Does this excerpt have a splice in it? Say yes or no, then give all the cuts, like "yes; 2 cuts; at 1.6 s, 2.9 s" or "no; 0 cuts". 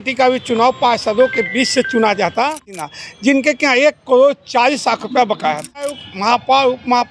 yes; 2 cuts; at 2.8 s, 6.0 s